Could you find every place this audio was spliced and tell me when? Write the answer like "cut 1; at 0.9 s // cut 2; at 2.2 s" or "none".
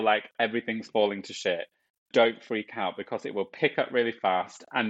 cut 1; at 1.9 s